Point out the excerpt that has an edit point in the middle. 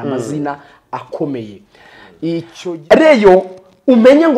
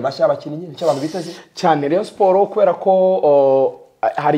first; 1 cut; at 2.5 s

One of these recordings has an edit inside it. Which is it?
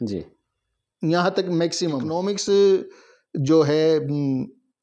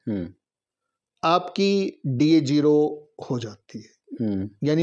first; 1 cut; at 2.1 s

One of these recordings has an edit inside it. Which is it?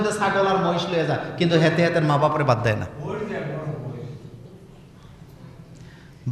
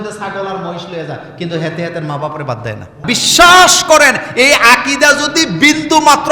second; 1 cut; at 3.0 s

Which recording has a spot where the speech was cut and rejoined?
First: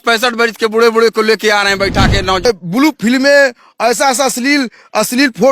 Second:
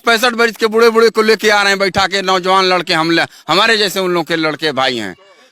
first; 1 cut; at 2.4 s

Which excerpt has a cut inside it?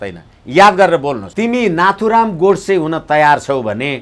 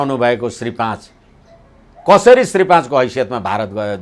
first; 1 cut; at 1.2 s

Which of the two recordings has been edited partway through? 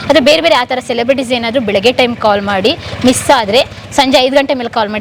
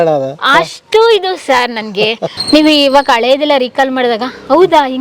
second; 1 cut; at 2.4 s

